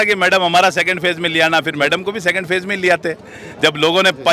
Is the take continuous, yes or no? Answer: yes